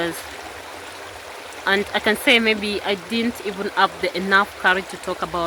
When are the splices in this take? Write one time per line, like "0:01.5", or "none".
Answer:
none